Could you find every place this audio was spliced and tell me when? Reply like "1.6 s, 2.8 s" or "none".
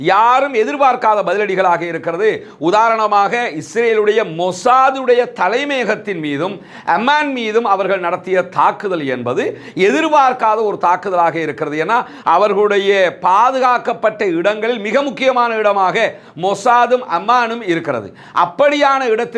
none

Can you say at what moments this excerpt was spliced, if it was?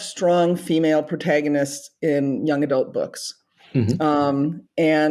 none

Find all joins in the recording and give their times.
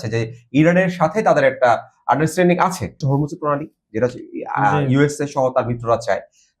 3.0 s

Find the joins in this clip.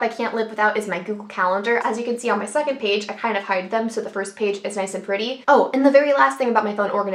1.8 s, 5.4 s

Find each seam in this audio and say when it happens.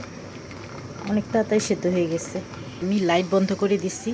2.8 s

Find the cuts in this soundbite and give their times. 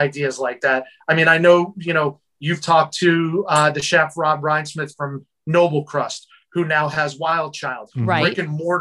none

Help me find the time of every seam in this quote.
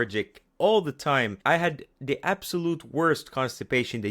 1.4 s

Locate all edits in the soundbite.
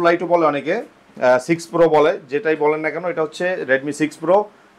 none

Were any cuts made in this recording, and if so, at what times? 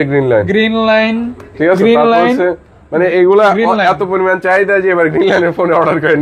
none

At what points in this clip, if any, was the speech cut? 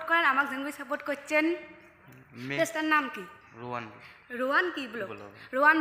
none

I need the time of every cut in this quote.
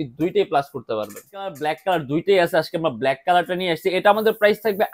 1.6 s

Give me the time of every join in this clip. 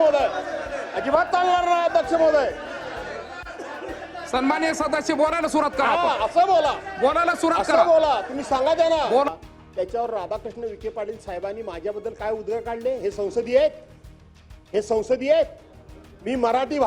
9.3 s

